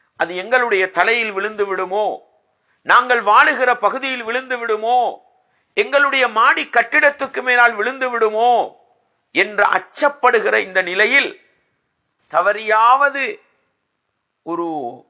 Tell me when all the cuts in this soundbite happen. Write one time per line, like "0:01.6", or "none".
none